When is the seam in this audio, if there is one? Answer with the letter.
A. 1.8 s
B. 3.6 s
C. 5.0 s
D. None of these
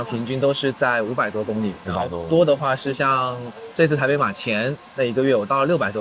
D